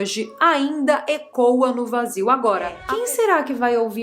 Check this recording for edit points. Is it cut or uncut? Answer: cut